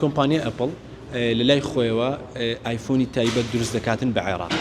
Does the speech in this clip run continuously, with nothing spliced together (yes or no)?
yes